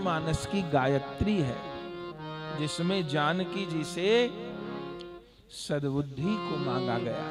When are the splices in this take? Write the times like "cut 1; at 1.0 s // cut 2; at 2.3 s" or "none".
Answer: none